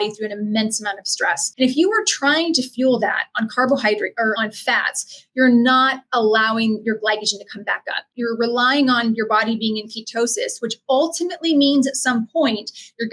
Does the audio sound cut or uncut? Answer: cut